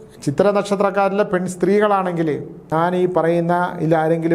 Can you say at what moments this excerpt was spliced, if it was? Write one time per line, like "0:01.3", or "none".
0:02.6